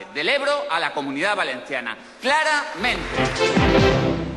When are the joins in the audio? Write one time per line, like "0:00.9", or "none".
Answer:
0:03.1

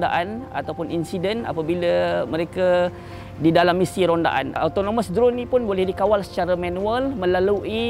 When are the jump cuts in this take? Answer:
0:04.5

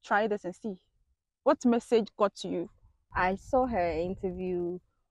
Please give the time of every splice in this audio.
0:03.0

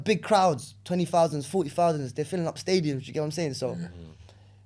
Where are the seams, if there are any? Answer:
none

